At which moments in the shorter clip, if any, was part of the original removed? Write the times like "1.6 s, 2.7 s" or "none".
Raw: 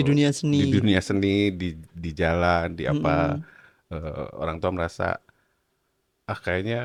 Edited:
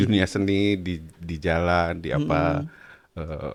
none

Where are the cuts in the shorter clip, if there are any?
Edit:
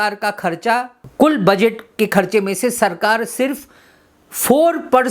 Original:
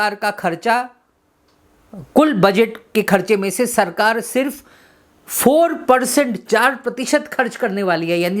1.0 s

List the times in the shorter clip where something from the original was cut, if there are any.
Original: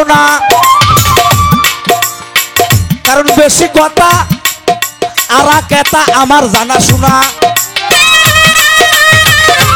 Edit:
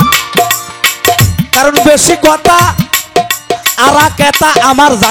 none

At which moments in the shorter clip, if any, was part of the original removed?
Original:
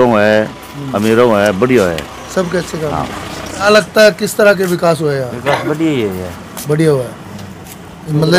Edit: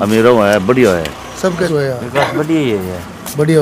1.7 s

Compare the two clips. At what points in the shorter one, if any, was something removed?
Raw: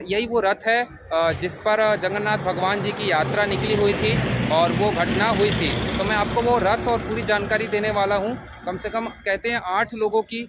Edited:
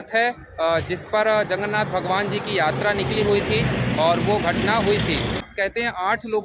5.4 s

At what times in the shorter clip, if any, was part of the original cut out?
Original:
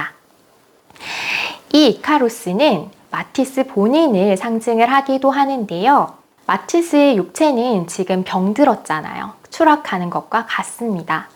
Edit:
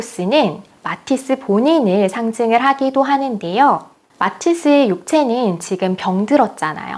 none

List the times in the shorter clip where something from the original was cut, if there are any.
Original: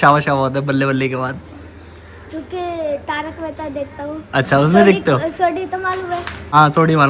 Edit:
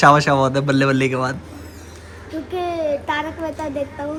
none

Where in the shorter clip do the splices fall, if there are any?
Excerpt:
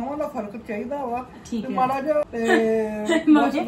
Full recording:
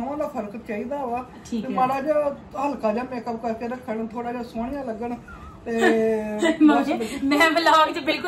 2.2 s

